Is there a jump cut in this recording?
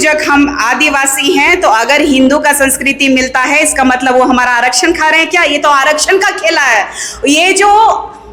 no; 0 cuts

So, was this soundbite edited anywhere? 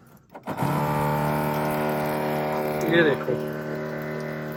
no; 0 cuts

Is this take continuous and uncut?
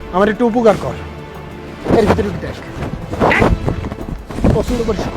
yes; 0 cuts

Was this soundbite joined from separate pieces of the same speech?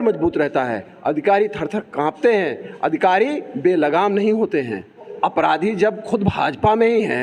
yes; 1 cut; at 5.1 s

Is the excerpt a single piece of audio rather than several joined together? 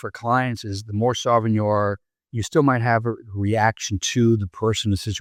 yes; 0 cuts

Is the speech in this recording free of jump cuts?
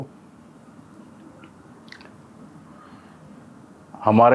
yes; 0 cuts

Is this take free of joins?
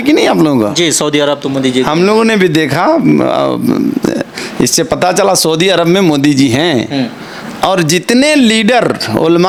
yes; 0 cuts

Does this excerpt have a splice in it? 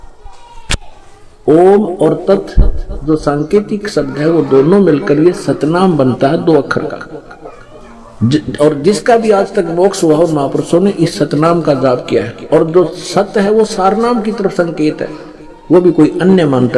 no; 0 cuts

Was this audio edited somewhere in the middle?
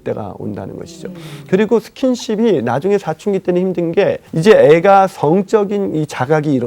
yes; 1 cut; at 4.3 s

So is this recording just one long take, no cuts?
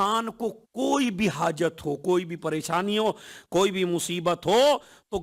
yes; 0 cuts

